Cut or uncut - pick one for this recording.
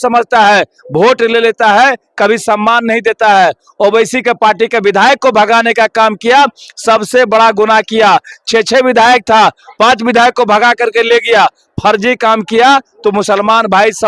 uncut